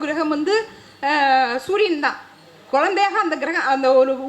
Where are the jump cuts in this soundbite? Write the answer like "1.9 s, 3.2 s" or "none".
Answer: none